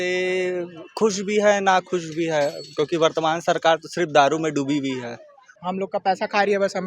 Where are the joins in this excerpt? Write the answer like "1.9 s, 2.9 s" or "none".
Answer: 5.5 s